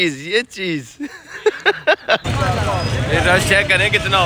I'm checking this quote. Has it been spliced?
yes; 1 cut; at 2.2 s

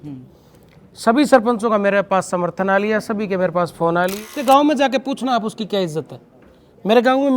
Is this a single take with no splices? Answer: no; 1 cut; at 4.2 s

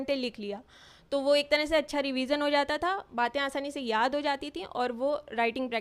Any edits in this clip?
no; 0 cuts

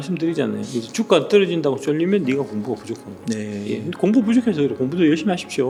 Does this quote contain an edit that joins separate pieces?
no; 0 cuts

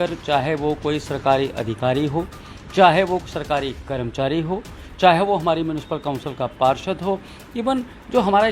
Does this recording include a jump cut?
no; 0 cuts

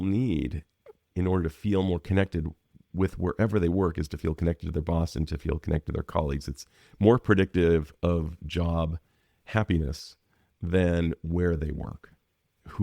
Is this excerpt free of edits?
no; 1 cut; at 1.0 s

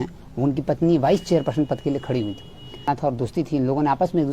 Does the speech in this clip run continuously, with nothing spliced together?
no; 1 cut; at 2.9 s

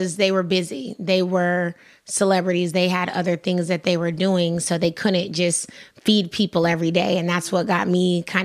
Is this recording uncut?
yes; 0 cuts

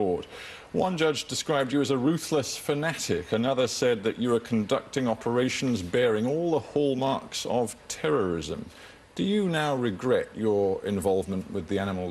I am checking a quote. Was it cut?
yes; 1 cut; at 2.2 s

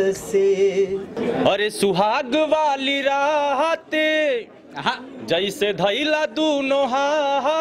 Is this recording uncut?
no; 1 cut; at 1.1 s

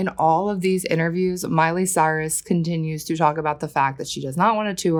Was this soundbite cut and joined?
no; 0 cuts

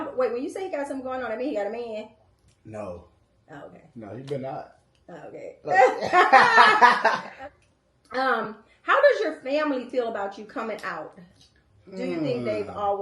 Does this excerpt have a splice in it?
yes; 1 cut; at 7.3 s

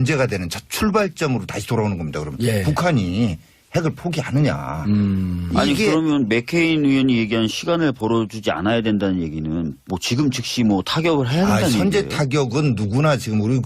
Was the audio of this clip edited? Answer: yes; 1 cut; at 1.2 s

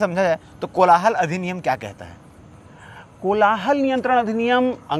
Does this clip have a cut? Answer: no; 0 cuts

